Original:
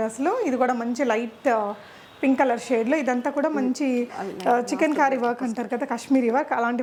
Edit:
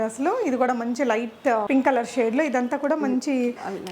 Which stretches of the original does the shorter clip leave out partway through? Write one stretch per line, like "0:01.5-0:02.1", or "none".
0:01.7-0:02.2